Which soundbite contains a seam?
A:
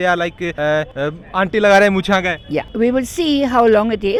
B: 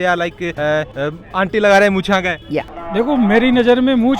B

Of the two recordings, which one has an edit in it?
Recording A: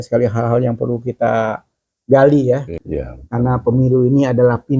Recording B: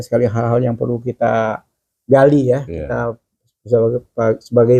A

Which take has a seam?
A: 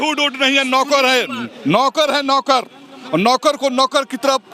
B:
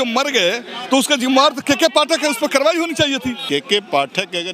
B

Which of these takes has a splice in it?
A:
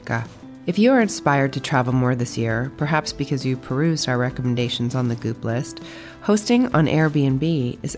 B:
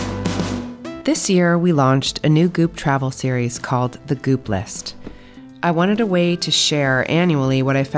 B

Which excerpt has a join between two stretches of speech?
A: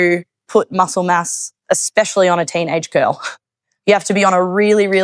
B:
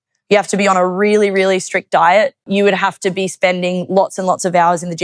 B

